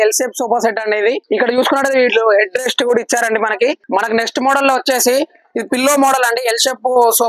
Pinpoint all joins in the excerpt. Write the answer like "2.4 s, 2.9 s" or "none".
1.2 s, 3.8 s

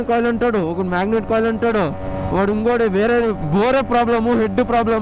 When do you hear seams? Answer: none

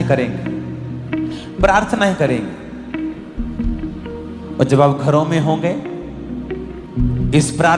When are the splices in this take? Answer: none

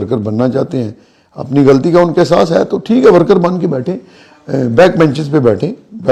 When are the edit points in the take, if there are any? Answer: none

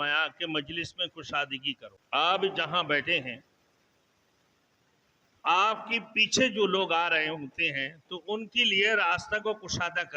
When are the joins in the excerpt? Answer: 1.9 s

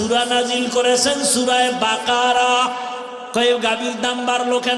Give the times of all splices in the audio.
3.2 s

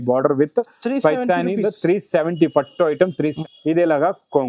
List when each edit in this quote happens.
3.4 s

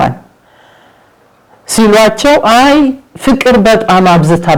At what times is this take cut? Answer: none

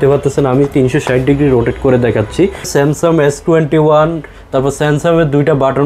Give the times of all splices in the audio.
2.7 s

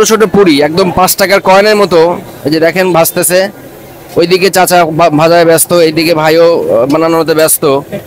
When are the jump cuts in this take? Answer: none

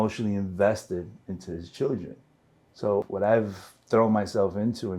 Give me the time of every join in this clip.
2.9 s

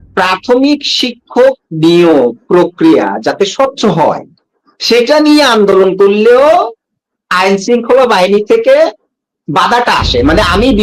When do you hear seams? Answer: none

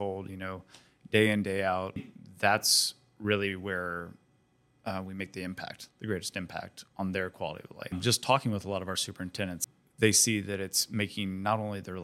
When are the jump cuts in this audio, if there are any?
2.1 s, 8.0 s, 9.6 s

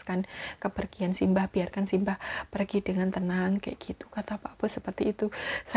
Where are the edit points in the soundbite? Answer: none

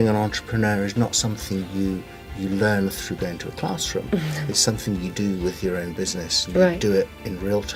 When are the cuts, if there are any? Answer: none

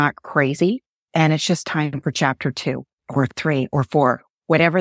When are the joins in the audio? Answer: 0.9 s, 2.9 s

